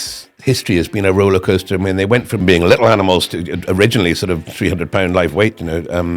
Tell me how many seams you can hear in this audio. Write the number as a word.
one